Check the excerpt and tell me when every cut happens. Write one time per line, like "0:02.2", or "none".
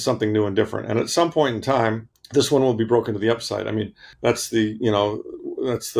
0:02.1
0:04.0